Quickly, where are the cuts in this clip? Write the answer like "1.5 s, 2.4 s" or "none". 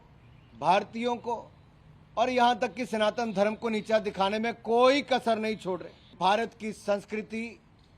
6.1 s